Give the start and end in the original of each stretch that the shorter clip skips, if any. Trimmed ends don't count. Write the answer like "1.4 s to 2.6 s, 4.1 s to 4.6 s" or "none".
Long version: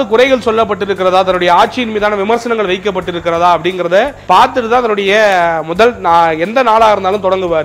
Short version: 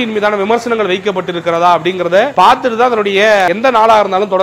4.1 s to 4.2 s, 5.4 s to 6.4 s

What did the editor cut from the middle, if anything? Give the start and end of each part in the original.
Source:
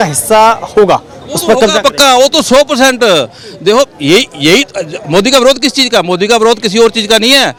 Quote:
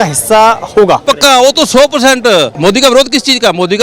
1.0 s to 1.8 s, 3.3 s to 5.0 s

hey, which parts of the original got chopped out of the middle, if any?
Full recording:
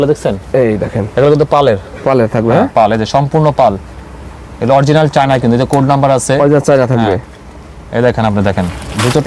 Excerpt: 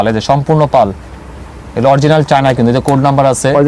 none

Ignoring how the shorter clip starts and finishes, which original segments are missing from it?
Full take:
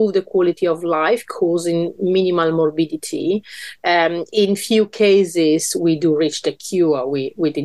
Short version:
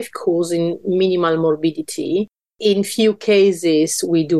3.7 s to 4.2 s

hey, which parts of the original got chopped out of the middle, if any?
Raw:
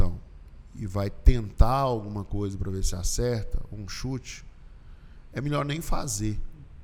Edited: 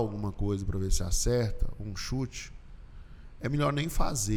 none

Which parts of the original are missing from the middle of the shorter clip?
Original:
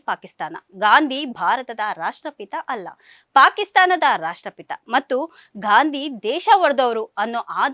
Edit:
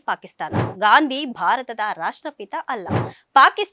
none

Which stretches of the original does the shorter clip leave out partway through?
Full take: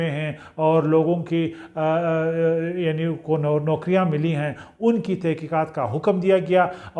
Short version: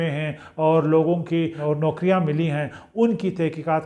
1.6 s to 3.4 s

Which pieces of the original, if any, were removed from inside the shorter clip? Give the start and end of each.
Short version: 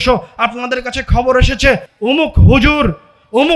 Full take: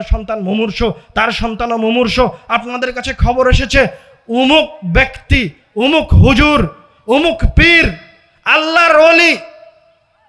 4.0 s to 5.6 s

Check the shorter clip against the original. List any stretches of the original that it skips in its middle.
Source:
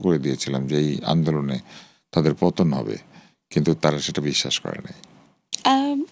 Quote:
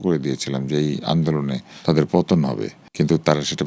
1.7 s to 1.9 s, 3.0 s to 3.3 s

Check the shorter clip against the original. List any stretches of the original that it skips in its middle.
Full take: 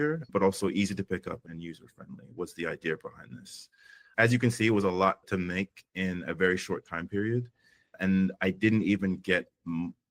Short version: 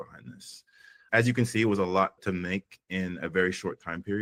none

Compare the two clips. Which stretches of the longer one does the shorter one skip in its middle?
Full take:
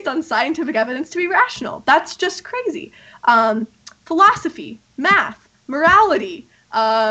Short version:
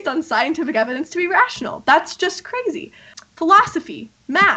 3.1 s to 3.8 s

